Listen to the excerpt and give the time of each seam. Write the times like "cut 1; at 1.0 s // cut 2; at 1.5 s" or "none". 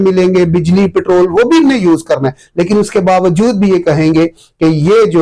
none